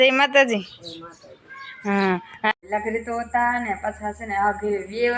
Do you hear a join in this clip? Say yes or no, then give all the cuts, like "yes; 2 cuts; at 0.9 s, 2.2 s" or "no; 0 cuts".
yes; 1 cut; at 2.5 s